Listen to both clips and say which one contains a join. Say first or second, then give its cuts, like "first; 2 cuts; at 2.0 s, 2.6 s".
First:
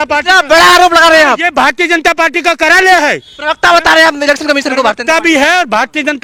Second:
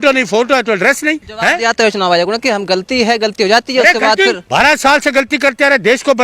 second; 2 cuts; at 1.3 s, 4.4 s